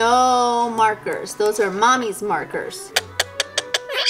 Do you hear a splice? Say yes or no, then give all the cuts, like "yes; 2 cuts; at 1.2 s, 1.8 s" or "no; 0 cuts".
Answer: yes; 1 cut; at 2.9 s